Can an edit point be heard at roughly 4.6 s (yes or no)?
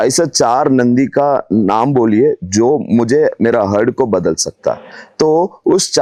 no